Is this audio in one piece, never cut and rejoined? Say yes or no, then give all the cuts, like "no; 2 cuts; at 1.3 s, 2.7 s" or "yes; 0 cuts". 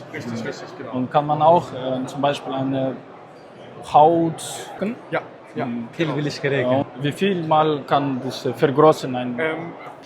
no; 2 cuts; at 4.8 s, 6.8 s